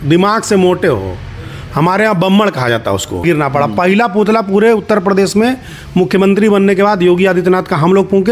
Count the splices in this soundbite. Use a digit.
1